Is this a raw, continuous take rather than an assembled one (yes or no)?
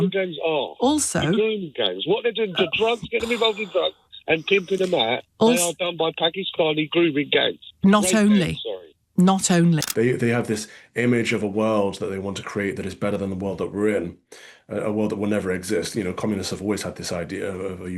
no